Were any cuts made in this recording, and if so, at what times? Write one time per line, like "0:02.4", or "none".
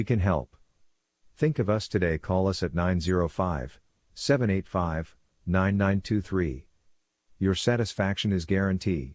none